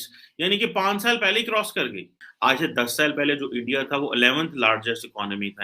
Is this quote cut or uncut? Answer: cut